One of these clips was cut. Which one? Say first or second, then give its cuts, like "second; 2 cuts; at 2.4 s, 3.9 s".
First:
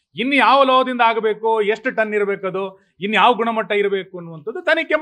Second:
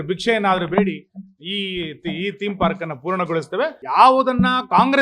second; 1 cut; at 3.8 s